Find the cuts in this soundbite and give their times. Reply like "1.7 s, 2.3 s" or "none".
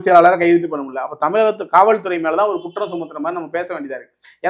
none